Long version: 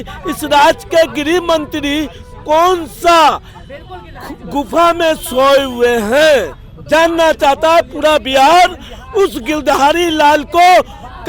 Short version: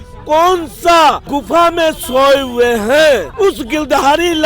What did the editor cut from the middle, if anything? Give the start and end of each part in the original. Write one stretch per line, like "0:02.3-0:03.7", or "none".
0:03.4-0:04.5
0:06.5-0:09.0